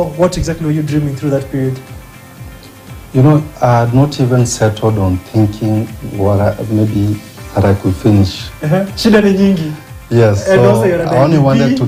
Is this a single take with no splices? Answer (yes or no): yes